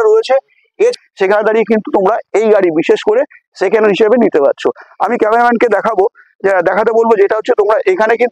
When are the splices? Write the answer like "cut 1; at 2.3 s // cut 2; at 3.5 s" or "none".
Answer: cut 1; at 0.9 s